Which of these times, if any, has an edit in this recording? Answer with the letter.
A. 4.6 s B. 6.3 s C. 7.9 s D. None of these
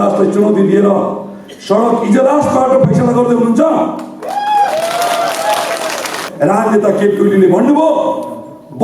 B